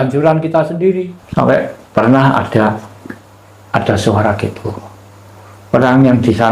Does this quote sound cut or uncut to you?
cut